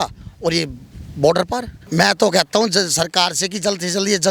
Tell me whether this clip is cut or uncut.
cut